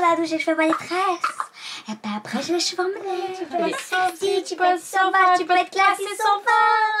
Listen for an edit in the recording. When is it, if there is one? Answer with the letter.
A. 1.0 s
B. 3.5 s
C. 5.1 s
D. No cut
B